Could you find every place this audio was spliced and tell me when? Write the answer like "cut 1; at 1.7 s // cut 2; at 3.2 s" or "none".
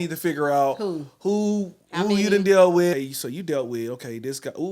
cut 1; at 3.0 s